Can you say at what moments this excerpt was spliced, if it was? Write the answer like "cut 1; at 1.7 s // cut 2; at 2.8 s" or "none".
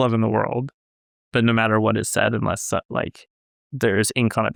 none